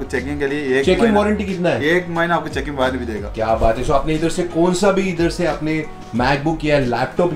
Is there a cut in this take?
no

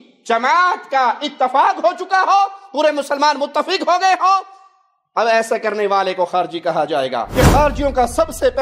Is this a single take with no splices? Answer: no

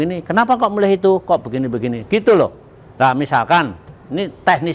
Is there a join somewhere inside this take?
no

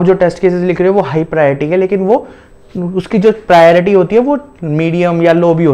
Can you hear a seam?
no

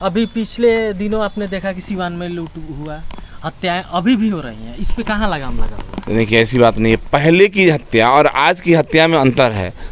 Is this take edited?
no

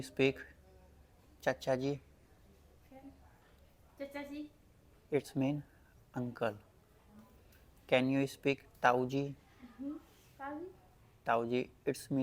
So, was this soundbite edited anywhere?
no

